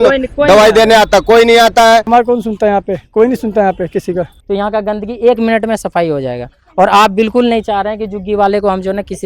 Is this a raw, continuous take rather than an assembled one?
no; 2 cuts; at 2.1 s, 4.3 s

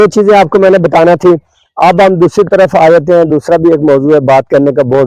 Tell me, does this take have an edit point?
no; 0 cuts

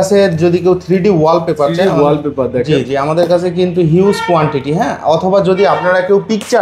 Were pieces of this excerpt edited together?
no; 0 cuts

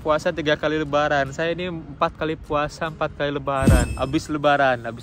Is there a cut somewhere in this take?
yes; 1 cut; at 3.9 s

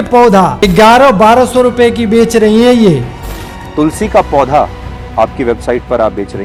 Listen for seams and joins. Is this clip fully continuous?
yes; 0 cuts

